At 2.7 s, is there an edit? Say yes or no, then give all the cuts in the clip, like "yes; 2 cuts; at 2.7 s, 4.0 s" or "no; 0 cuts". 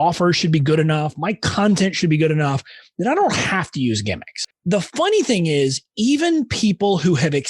no; 1 cut; at 4.5 s